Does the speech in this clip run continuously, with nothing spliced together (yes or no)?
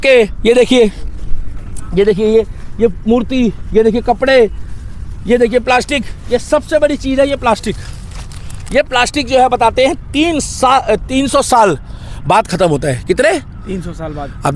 yes